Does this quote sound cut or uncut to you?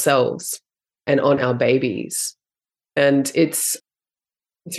cut